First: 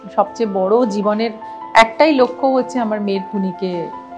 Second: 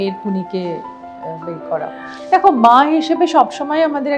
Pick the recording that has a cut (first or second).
second